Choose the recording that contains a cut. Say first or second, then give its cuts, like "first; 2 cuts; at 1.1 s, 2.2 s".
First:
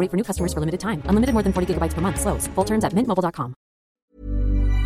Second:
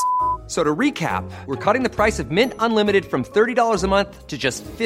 first; 1 cut; at 3.8 s